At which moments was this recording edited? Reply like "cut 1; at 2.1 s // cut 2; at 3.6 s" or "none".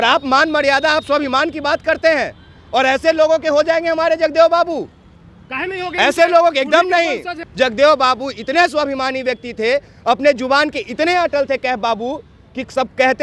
cut 1; at 7.4 s